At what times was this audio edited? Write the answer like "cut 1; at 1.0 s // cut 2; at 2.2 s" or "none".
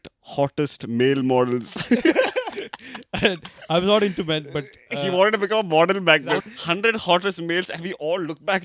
cut 1; at 6.4 s